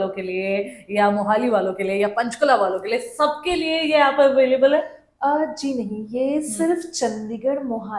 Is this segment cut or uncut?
uncut